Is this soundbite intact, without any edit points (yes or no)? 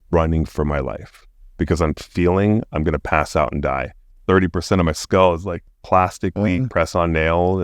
no